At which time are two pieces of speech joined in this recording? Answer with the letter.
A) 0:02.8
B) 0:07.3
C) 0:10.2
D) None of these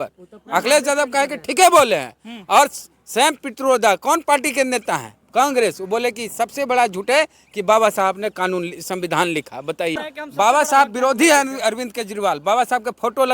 C